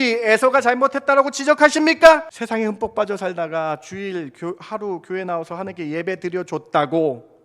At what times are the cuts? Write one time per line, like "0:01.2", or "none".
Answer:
0:02.3

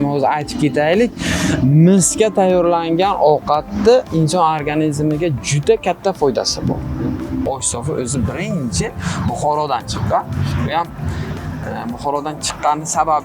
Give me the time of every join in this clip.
0:07.4

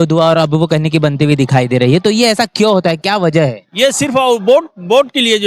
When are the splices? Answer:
none

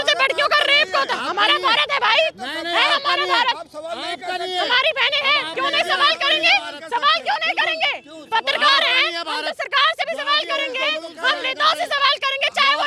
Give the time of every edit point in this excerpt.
none

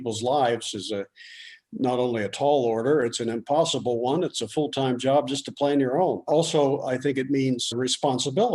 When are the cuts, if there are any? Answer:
0:06.3
0:07.7

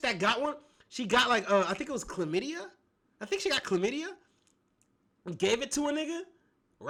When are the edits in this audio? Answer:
none

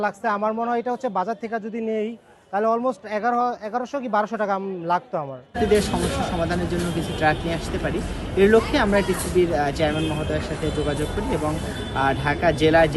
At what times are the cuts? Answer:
none

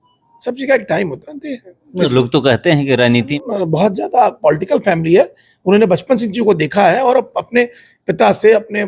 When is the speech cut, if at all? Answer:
0:03.3

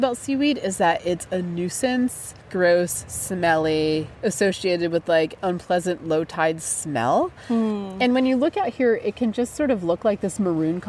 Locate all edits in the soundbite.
none

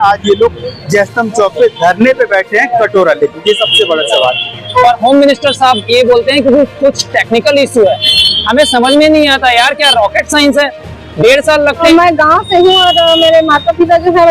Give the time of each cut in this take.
0:04.8
0:11.8

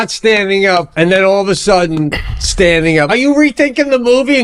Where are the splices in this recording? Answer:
0:00.9
0:03.1

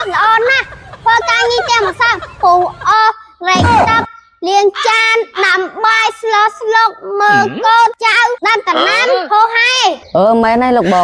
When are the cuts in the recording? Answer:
none

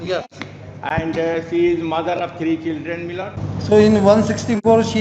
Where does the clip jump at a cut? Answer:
0:03.4

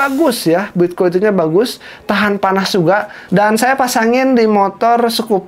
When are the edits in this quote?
0:03.2

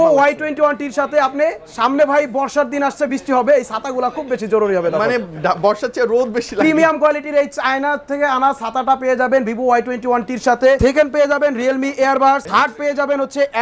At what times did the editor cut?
0:10.8
0:12.4

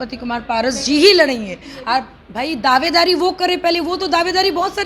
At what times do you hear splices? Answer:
none

